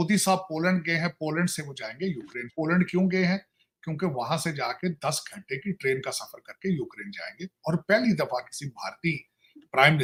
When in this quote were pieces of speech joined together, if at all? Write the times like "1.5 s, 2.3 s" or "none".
none